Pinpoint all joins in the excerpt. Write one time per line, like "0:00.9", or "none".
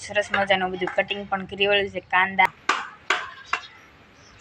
0:02.5